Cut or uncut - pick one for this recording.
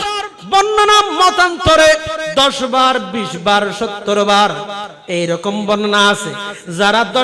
uncut